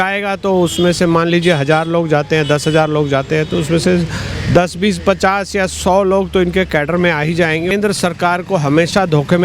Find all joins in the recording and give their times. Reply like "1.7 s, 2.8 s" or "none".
7.7 s